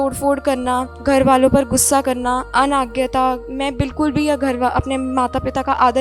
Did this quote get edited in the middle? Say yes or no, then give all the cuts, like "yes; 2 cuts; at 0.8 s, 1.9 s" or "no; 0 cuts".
yes; 3 cuts; at 0.9 s, 2.5 s, 3.5 s